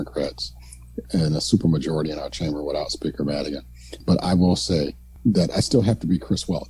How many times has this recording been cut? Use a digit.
2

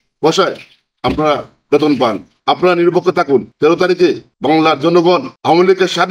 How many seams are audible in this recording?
3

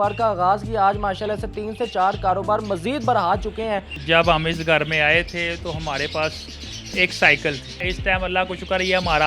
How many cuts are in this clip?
2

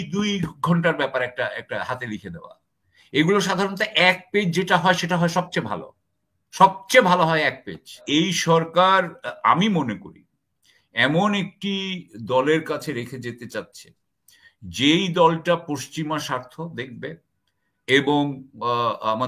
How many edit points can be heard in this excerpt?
1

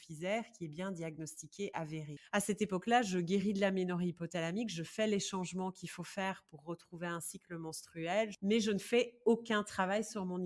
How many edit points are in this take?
2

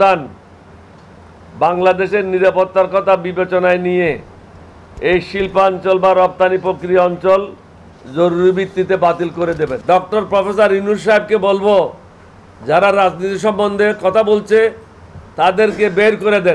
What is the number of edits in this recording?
1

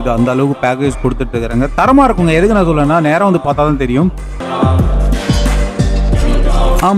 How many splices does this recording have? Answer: 1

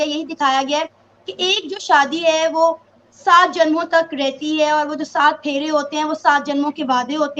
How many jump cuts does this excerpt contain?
0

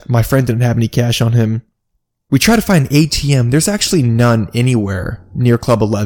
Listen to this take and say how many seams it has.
1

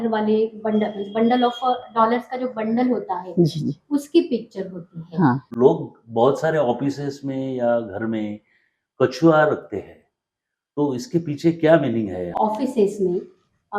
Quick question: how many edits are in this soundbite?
2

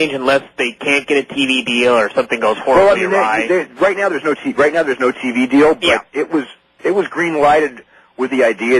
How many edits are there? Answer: 1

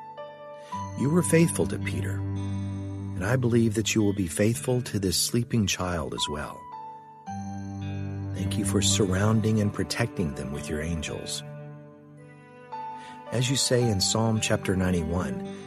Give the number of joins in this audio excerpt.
2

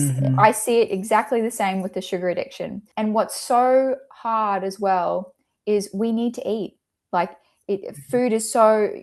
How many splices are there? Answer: 1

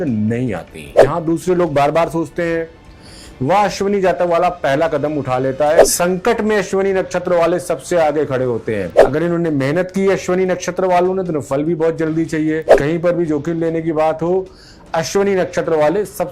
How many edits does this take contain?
4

